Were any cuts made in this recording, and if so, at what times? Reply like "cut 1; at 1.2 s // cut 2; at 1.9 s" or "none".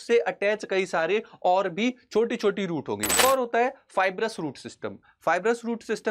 cut 1; at 3.2 s